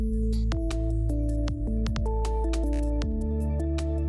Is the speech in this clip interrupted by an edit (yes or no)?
no